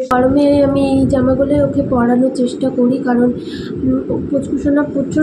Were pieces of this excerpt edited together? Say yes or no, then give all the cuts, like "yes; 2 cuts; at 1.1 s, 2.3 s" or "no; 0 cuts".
no; 0 cuts